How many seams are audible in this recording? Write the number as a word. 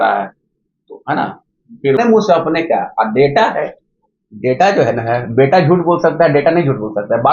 one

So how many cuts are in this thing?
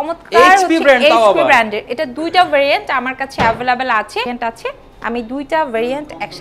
one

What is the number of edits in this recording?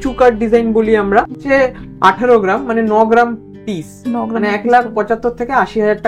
one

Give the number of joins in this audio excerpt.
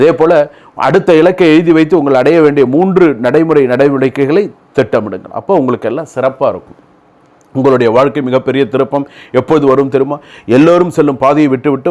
zero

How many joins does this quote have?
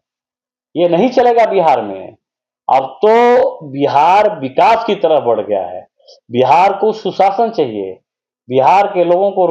zero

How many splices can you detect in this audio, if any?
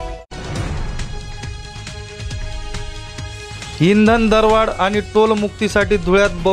zero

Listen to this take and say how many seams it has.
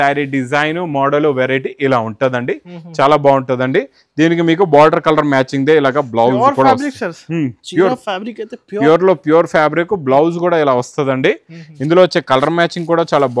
zero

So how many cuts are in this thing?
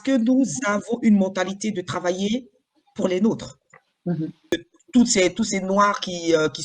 one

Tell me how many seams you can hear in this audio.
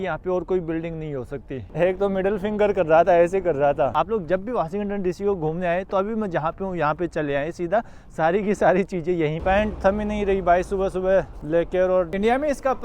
four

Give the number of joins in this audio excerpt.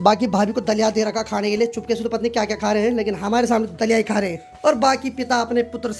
zero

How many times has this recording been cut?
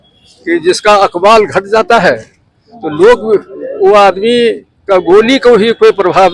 zero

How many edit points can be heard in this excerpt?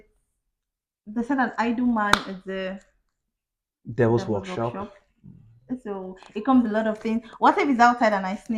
zero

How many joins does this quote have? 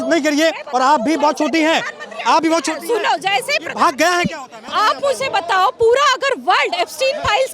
one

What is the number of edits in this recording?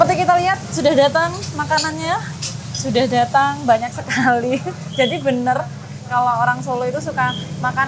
zero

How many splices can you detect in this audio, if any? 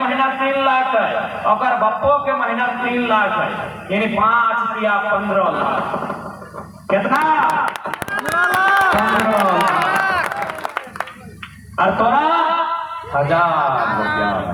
zero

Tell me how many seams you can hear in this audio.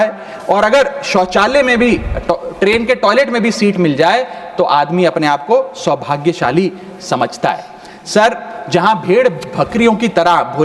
zero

